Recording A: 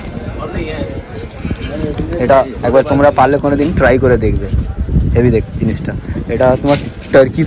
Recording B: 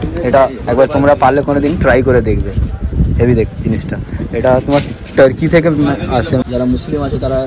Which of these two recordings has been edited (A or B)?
B